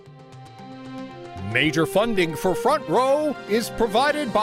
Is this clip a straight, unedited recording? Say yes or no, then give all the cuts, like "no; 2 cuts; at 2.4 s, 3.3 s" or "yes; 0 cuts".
no; 1 cut; at 1.4 s